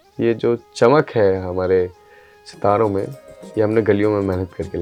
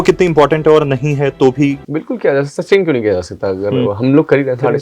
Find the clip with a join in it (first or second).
second